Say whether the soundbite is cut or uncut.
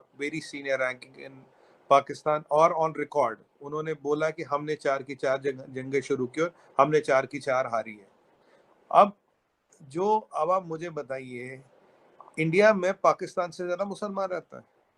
uncut